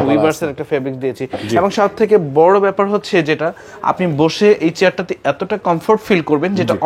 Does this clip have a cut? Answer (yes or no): no